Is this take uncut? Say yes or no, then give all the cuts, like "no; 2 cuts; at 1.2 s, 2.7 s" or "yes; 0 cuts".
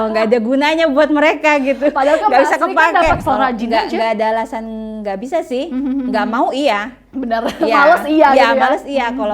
no; 1 cut; at 3.2 s